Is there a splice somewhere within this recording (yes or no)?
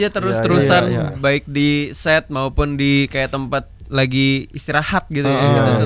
no